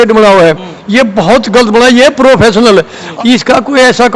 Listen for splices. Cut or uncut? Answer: cut